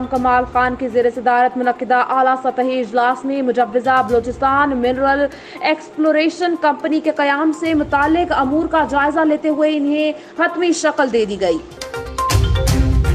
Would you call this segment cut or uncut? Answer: cut